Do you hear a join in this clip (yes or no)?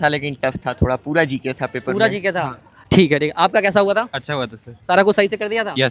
no